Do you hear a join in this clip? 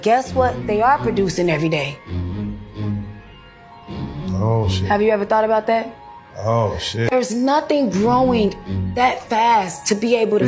no; 0 cuts

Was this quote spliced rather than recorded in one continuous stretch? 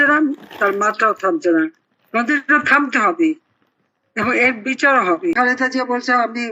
yes; 1 cut; at 5.3 s

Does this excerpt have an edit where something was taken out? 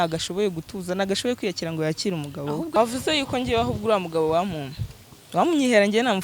yes; 1 cut; at 2.8 s

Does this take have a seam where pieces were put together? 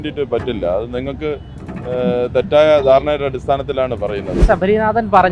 yes; 1 cut; at 4.4 s

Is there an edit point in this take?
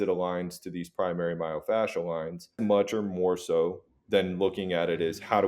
yes; 1 cut; at 2.6 s

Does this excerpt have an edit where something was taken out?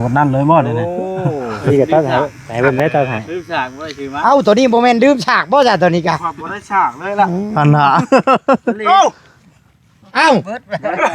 yes; 1 cut; at 1.6 s

